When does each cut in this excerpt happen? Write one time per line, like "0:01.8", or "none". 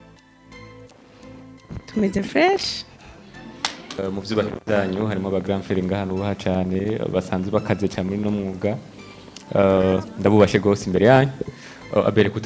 0:04.0